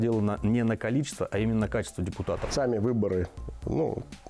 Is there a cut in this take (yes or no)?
yes